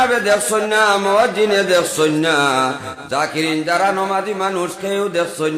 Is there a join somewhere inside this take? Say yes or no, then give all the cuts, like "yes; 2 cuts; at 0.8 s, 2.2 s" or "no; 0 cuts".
no; 0 cuts